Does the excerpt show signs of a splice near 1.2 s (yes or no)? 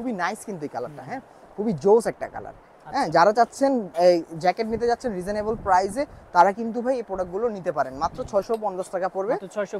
no